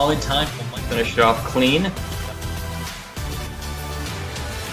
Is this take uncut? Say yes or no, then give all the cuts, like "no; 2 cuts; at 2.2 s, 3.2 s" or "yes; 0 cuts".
yes; 0 cuts